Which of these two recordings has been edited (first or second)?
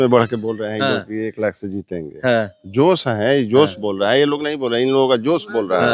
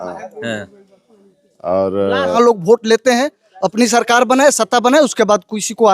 second